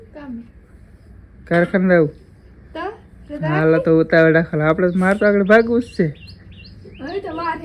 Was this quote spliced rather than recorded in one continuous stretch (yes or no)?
no